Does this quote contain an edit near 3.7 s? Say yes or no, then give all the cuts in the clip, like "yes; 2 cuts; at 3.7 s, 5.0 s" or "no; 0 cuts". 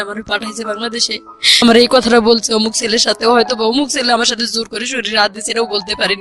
no; 1 cut; at 1.6 s